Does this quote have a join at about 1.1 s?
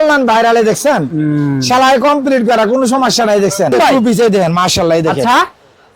no; 1 cut; at 3.7 s

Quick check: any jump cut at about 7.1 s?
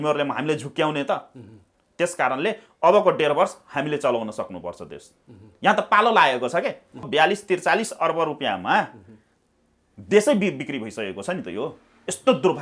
yes; 1 cut; at 7.1 s

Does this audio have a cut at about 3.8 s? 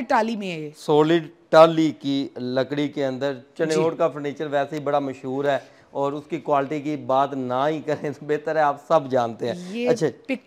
no; 0 cuts

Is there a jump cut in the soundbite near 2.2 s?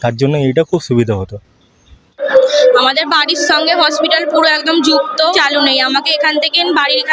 yes; 2 cuts; at 2.2 s, 5.3 s

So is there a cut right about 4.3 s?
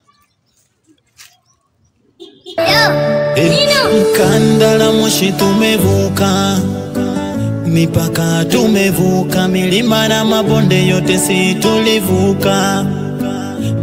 no; 1 cut; at 2.5 s

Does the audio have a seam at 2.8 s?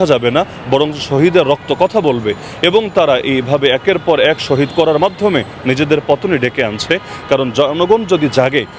no; 0 cuts

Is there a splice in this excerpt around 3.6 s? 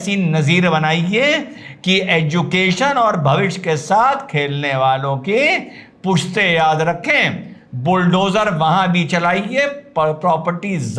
no; 0 cuts

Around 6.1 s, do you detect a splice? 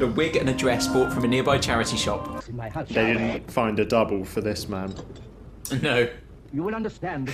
no; 1 cut; at 2.4 s

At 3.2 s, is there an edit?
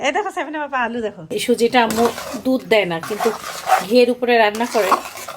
no; 1 cut; at 1.2 s

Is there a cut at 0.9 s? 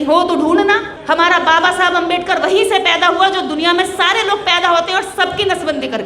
yes; 1 cut; at 0.9 s

